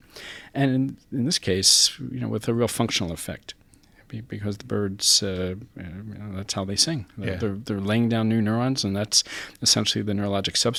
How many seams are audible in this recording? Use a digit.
0